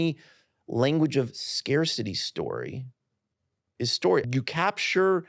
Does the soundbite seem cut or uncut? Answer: cut